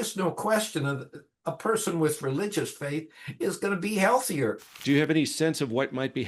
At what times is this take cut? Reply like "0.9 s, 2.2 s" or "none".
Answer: 4.7 s